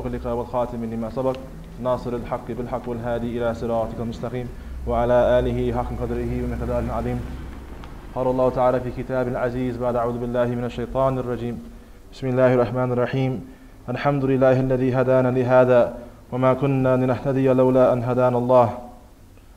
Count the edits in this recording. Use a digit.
1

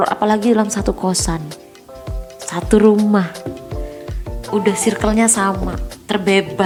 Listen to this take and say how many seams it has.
0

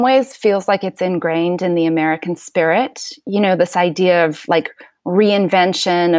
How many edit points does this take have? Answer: 0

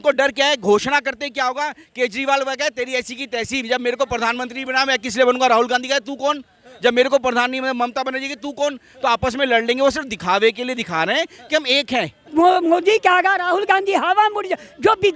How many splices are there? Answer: 1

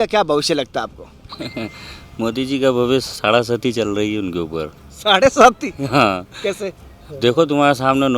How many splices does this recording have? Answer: 0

